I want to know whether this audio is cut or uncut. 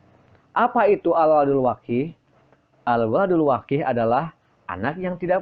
uncut